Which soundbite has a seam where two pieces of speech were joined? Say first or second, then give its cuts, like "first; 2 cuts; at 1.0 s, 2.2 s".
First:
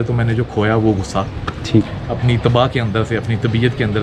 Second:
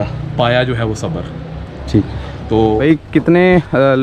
second; 1 cut; at 2.8 s